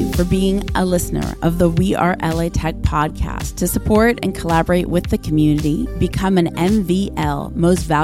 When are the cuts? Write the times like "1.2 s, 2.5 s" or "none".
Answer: none